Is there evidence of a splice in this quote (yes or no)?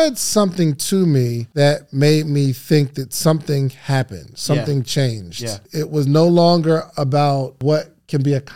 yes